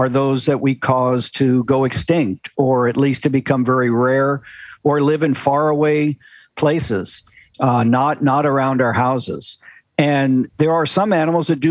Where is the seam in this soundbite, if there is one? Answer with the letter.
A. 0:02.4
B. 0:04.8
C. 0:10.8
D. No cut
D